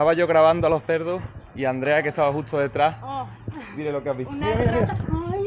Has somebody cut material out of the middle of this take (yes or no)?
no